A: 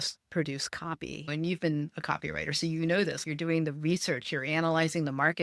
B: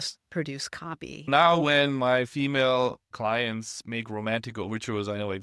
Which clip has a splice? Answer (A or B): B